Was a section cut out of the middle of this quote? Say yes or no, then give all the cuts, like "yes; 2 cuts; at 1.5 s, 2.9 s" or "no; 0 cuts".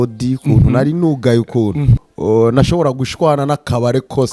yes; 1 cut; at 2.0 s